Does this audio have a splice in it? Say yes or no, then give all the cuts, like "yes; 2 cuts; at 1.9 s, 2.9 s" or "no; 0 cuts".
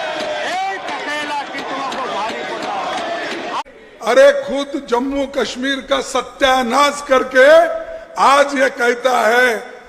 yes; 1 cut; at 3.6 s